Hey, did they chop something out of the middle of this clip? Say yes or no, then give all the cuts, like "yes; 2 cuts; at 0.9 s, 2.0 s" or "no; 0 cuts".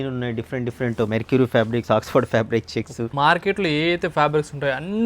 yes; 2 cuts; at 1.1 s, 3.1 s